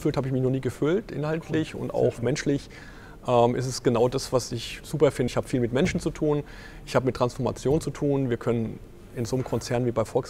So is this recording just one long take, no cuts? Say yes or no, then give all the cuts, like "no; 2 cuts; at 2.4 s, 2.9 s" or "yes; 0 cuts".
yes; 0 cuts